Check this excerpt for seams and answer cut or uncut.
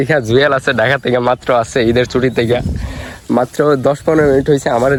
uncut